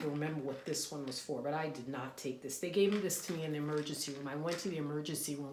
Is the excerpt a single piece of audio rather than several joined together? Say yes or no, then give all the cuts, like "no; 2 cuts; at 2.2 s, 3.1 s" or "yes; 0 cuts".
yes; 0 cuts